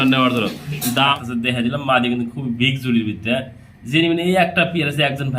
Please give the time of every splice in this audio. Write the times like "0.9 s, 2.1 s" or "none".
1.1 s